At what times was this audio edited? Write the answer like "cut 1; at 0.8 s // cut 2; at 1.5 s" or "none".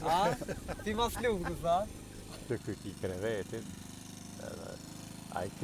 cut 1; at 2.4 s